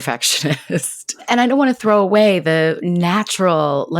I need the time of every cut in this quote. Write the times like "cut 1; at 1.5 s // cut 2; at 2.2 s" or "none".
cut 1; at 1.1 s